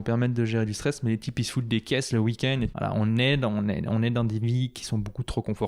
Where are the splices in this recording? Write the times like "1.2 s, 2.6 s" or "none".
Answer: 2.7 s